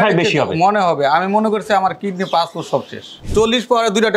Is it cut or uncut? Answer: cut